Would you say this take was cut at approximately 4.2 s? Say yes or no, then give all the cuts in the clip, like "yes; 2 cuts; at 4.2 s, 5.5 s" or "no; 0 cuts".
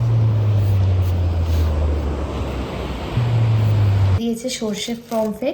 yes; 1 cut; at 4.2 s